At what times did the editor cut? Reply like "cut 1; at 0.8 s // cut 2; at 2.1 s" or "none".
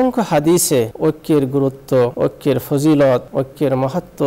cut 1; at 0.9 s // cut 2; at 2.1 s // cut 3; at 3.3 s